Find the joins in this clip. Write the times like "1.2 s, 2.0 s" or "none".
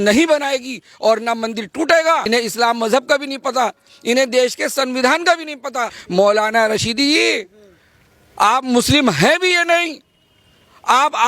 2.2 s, 6.0 s